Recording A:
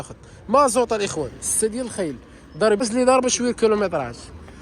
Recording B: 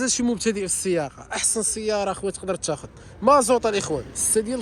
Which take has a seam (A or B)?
A